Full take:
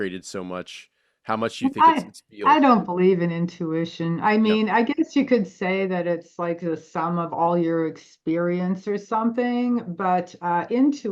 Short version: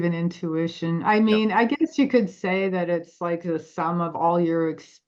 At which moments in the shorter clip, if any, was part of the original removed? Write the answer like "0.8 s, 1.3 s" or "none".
none